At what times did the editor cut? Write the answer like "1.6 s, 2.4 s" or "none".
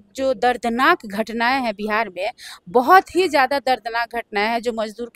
none